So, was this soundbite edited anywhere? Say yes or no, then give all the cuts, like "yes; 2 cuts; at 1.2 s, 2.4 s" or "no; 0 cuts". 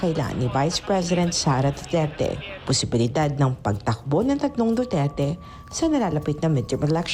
no; 0 cuts